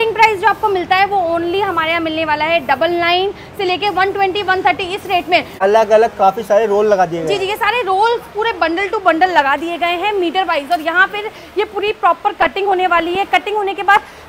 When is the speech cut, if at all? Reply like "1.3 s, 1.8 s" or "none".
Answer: 5.6 s